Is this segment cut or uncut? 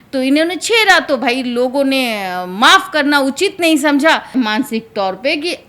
cut